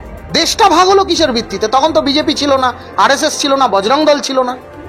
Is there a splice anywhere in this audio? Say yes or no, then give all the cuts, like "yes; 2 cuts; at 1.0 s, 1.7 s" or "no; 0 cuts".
no; 0 cuts